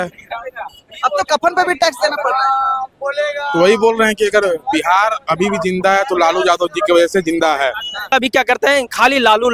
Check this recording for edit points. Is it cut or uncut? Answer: cut